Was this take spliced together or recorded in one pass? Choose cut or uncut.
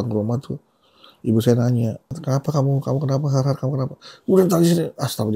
cut